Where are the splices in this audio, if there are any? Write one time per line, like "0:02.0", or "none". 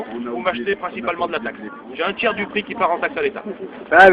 0:03.1